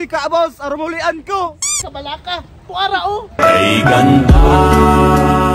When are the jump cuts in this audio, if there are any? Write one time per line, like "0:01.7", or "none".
0:01.7

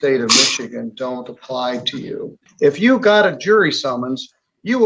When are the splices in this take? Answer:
0:02.4

